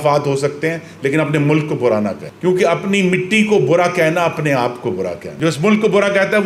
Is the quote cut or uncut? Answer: uncut